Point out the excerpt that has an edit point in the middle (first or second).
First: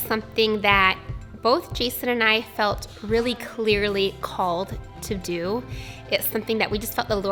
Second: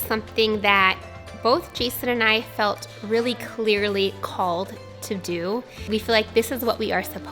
second